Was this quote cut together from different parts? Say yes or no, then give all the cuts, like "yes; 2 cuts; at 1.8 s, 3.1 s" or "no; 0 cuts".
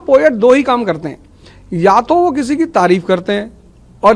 no; 0 cuts